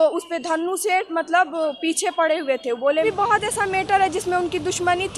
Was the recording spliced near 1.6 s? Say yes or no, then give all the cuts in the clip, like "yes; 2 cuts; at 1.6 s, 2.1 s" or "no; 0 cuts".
no; 1 cut; at 3.0 s